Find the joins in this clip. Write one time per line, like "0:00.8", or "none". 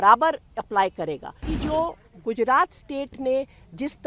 0:01.5